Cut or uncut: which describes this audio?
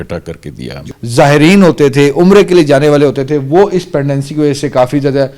cut